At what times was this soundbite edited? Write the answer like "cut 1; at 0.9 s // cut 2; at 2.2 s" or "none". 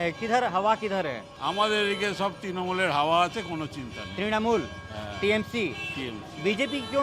cut 1; at 1.3 s